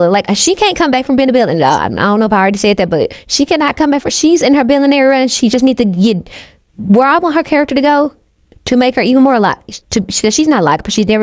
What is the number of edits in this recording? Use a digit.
0